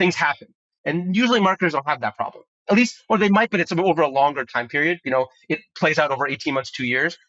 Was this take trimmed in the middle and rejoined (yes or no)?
no